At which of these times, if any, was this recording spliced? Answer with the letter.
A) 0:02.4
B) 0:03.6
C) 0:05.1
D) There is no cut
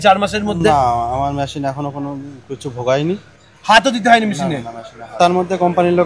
C